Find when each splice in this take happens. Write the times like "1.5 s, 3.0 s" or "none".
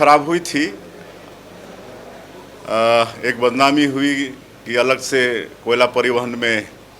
none